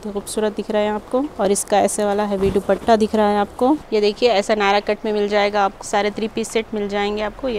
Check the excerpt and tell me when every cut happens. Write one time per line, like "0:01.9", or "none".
0:01.3
0:03.8
0:05.8